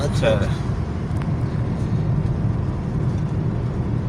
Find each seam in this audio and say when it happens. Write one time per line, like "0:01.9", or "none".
none